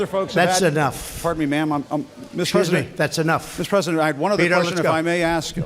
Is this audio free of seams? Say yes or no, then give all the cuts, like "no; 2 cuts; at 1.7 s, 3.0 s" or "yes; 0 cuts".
no; 1 cut; at 3.9 s